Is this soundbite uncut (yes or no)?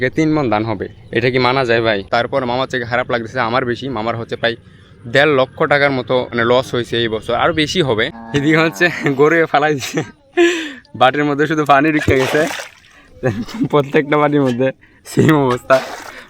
no